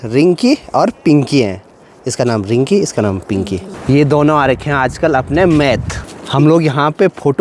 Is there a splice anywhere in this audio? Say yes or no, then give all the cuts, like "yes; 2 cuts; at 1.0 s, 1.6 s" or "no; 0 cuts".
no; 0 cuts